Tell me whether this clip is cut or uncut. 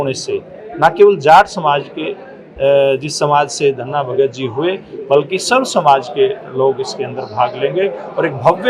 uncut